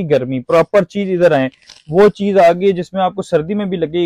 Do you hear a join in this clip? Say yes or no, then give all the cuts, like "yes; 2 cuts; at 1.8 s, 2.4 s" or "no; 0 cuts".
no; 0 cuts